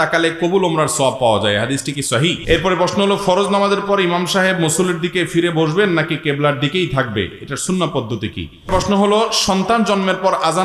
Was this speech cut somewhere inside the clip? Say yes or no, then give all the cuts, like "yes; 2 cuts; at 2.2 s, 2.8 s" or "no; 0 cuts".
yes; 2 cuts; at 2.4 s, 8.7 s